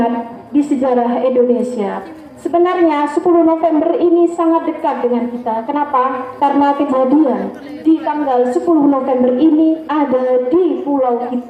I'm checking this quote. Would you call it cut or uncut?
uncut